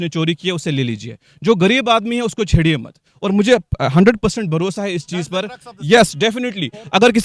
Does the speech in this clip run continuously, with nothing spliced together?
yes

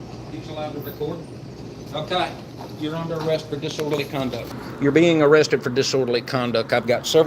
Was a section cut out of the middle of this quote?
yes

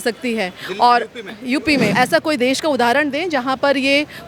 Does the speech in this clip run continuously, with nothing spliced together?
no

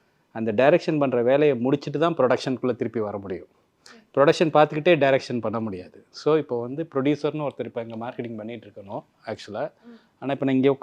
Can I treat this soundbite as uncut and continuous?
yes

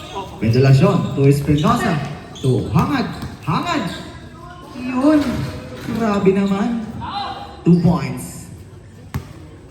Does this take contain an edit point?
no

